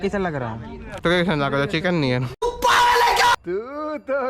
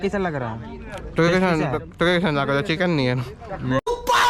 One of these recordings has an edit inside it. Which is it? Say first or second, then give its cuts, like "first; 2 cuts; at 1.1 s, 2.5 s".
first; 2 cuts; at 0.9 s, 2.4 s